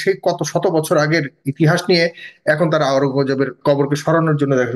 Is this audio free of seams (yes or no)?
no